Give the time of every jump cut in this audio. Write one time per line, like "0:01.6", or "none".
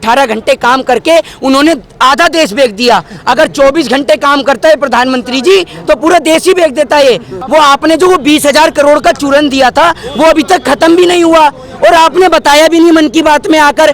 0:07.4